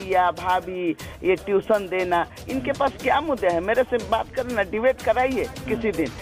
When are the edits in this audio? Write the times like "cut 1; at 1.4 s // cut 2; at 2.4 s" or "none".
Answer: none

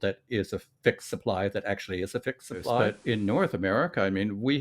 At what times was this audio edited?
cut 1; at 2.8 s

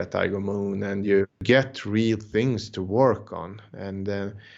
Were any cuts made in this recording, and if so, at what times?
cut 1; at 1.4 s

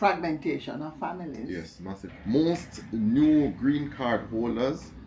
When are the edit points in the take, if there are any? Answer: cut 1; at 2.1 s

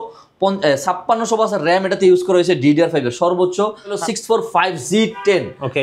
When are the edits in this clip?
cut 1; at 4.0 s

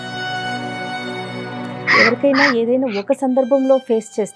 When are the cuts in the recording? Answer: none

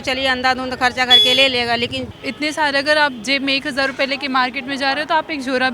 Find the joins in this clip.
cut 1; at 2.1 s

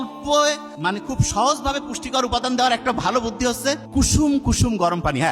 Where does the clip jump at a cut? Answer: cut 1; at 0.9 s // cut 2; at 3.8 s

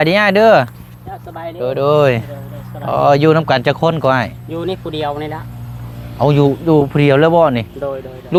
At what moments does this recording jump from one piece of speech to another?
none

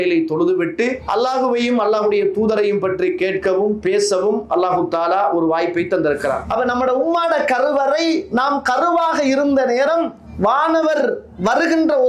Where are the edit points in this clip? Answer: cut 1; at 1.0 s // cut 2; at 6.4 s

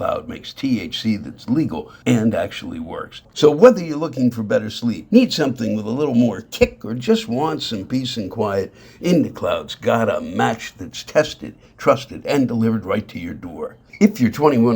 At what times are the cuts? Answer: cut 1; at 1.9 s // cut 2; at 3.3 s // cut 3; at 5.0 s

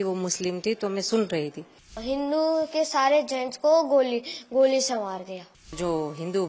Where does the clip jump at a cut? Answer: cut 1; at 2.0 s // cut 2; at 5.7 s

